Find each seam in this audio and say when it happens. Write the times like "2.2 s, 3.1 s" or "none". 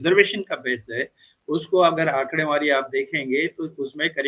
none